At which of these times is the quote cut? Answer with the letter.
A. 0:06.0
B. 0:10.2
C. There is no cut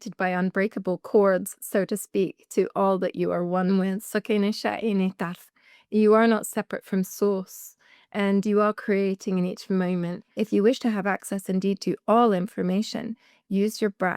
B